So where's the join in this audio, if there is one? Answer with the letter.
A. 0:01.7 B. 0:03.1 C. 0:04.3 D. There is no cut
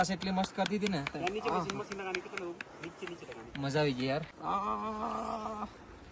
C